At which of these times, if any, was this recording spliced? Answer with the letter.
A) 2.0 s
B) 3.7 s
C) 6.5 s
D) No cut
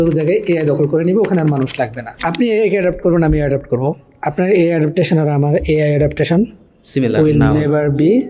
A